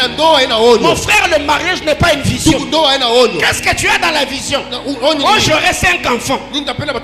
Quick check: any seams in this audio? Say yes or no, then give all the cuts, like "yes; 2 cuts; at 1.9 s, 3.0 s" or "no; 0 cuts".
no; 0 cuts